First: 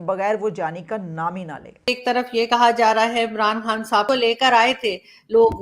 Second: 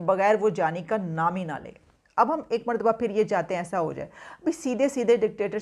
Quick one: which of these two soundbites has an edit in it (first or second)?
first